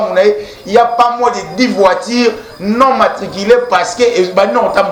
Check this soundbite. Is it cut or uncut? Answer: uncut